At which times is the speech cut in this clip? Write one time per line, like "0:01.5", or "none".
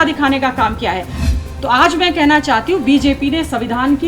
0:01.3

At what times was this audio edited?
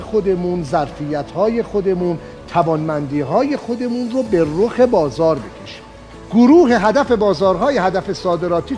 0:06.1

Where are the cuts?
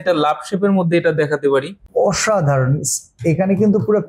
0:01.8

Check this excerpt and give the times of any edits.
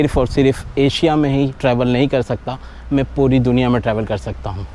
none

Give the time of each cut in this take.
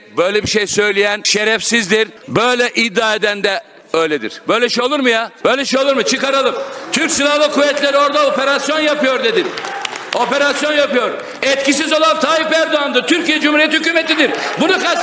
0:01.2
0:02.2
0:03.7
0:05.3

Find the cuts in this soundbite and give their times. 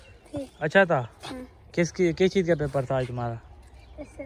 none

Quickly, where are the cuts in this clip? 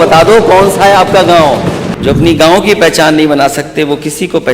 0:01.9

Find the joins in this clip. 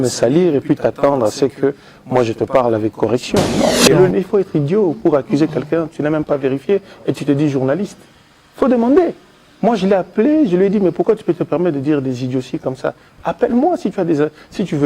0:03.8

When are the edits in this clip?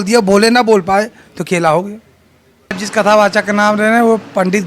0:02.8

